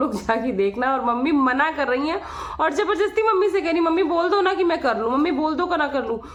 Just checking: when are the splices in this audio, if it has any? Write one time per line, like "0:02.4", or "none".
none